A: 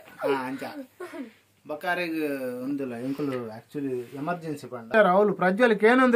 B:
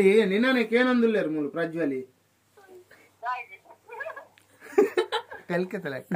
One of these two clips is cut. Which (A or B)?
A